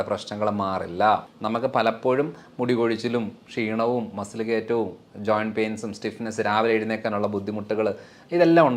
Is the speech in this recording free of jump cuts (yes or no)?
no